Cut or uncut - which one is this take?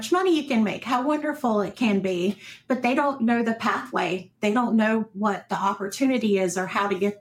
uncut